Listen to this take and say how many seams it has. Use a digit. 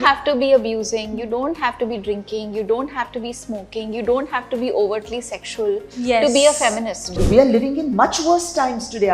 1